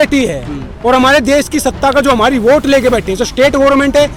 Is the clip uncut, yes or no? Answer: yes